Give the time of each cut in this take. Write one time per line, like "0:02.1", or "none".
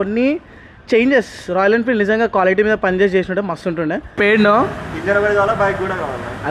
0:04.2